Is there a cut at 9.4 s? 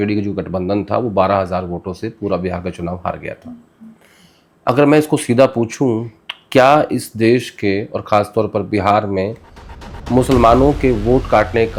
no; 0 cuts

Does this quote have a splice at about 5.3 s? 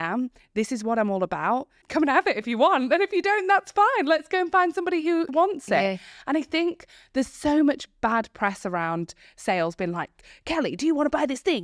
yes; 2 cuts; at 1.8 s, 5.3 s

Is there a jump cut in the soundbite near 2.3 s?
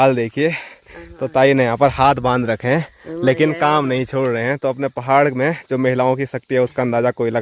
no; 0 cuts

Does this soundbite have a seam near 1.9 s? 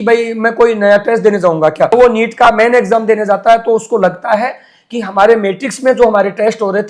yes; 1 cut; at 1.9 s

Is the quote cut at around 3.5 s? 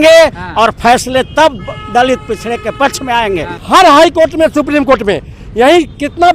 yes; 1 cut; at 3.5 s

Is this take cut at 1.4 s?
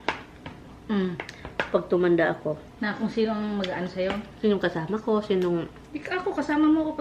no; 1 cut; at 2.7 s

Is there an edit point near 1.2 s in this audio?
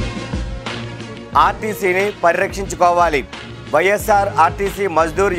yes; 1 cut; at 1.2 s

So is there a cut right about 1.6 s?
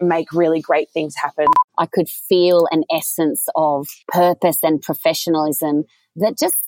yes; 2 cuts; at 1.6 s, 4.0 s

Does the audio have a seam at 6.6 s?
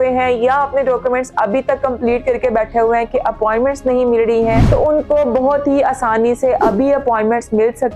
no; 1 cut; at 4.6 s

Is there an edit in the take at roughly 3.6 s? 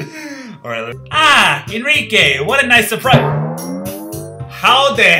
no; 1 cut; at 0.9 s

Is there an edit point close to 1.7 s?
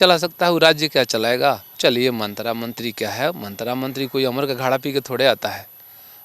yes; 1 cut; at 1.7 s

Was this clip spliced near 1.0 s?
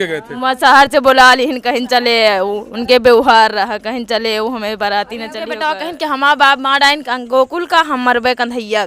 no; 1 cut; at 5.8 s

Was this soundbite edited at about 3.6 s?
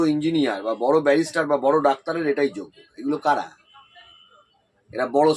no; 0 cuts

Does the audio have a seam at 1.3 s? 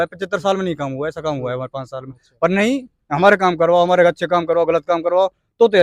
no; 0 cuts

